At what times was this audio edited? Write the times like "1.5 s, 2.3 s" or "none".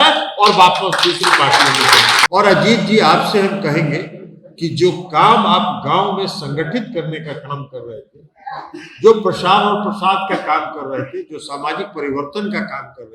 2.3 s